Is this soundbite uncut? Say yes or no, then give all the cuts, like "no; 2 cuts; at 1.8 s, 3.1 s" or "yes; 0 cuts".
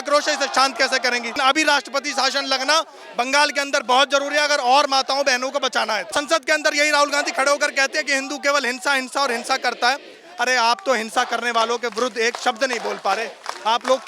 no; 2 cuts; at 1.4 s, 6.1 s